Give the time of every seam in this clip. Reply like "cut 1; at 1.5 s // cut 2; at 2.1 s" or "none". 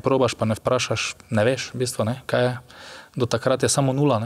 none

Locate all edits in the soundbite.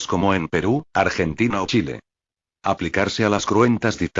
none

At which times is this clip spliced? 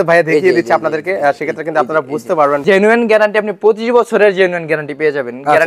cut 1; at 2.6 s

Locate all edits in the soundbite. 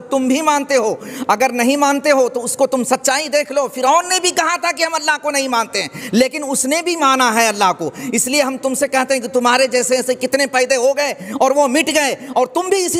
none

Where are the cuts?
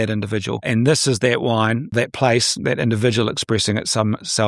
cut 1; at 1.9 s

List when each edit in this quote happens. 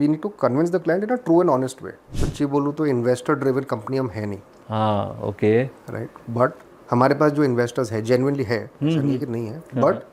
cut 1; at 2.1 s // cut 2; at 6.7 s

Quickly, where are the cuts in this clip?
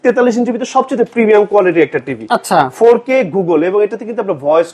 none

